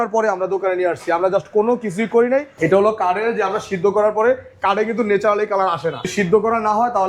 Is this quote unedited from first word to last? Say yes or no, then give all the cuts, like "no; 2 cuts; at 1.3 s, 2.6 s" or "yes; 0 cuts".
no; 2 cuts; at 2.5 s, 6.1 s